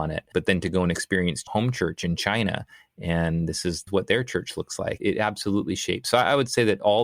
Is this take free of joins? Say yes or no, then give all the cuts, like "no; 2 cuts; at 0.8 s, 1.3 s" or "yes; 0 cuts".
no; 3 cuts; at 1.4 s, 3.9 s, 5.0 s